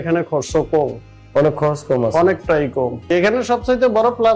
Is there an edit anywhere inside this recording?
yes; 1 cut; at 3.1 s

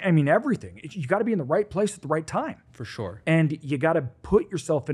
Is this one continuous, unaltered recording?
yes; 0 cuts

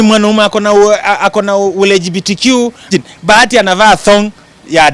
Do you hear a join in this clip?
yes; 1 cut; at 2.9 s

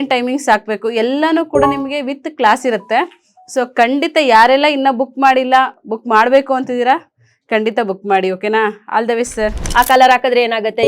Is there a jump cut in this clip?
yes; 1 cut; at 9.6 s

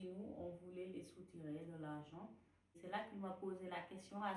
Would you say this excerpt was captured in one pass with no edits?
no; 1 cut; at 2.7 s

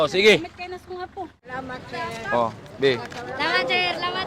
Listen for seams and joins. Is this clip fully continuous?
no; 1 cut; at 1.5 s

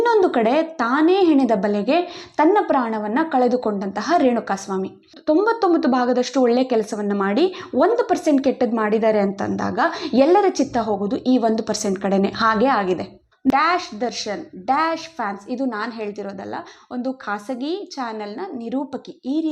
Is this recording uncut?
no; 2 cuts; at 5.2 s, 13.5 s

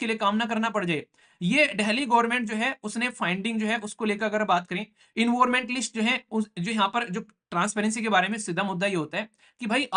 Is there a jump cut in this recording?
no; 0 cuts

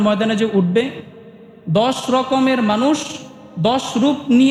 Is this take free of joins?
yes; 0 cuts

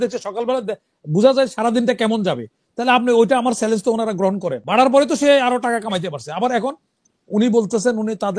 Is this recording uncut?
no; 1 cut; at 4.6 s

